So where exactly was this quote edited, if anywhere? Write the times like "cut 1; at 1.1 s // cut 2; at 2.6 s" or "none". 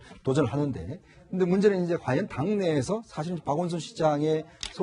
cut 1; at 3.4 s